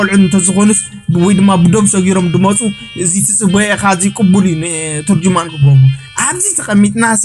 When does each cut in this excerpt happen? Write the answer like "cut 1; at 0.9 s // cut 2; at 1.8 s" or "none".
none